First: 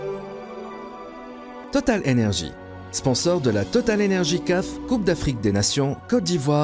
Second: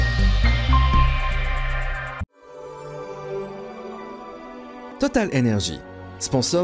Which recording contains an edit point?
second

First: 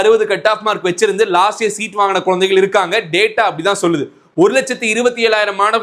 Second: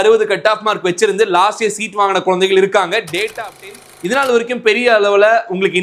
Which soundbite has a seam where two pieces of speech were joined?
second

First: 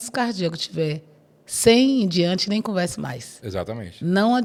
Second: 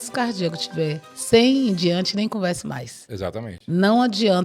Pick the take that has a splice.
second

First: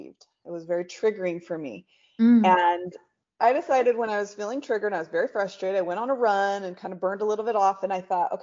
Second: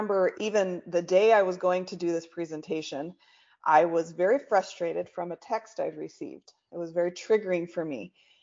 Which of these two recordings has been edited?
first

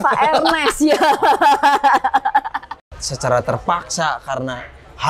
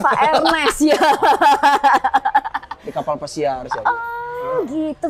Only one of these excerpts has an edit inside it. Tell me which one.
first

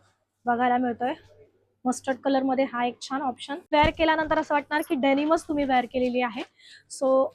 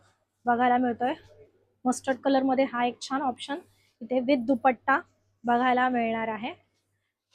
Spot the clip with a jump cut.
first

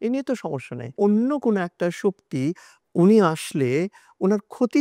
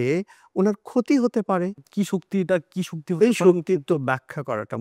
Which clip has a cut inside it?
first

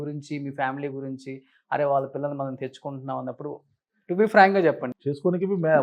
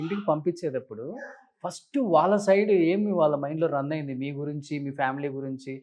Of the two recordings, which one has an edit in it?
first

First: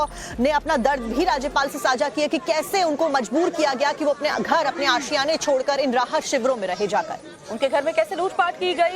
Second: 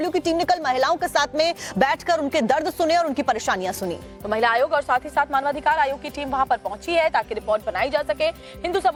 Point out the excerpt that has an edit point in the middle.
first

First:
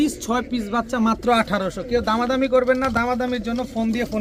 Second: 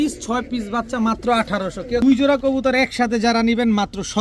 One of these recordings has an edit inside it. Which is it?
second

